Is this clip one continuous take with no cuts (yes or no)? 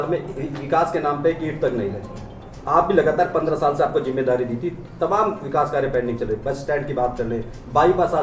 yes